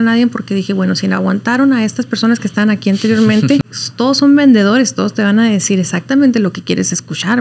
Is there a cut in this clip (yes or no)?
yes